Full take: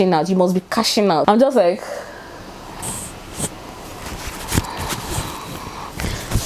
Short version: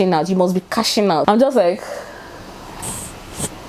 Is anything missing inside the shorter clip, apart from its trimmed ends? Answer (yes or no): no